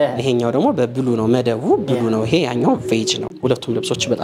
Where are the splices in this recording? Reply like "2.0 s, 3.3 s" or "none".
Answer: 3.3 s